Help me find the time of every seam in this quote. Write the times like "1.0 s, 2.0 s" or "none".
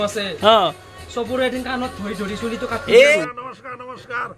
3.2 s